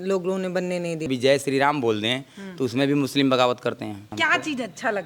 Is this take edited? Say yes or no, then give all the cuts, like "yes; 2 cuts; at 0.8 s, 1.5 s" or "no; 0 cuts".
yes; 2 cuts; at 1.1 s, 4.1 s